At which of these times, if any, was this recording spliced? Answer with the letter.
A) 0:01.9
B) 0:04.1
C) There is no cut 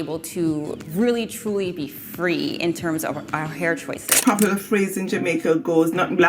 B